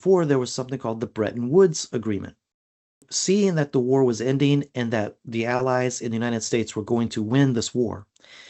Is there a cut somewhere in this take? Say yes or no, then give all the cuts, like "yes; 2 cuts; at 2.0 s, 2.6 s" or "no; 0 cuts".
yes; 1 cut; at 3.0 s